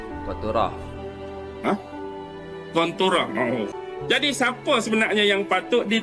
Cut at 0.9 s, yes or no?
no